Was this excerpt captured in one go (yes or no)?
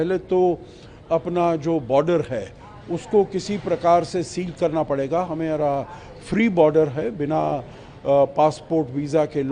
yes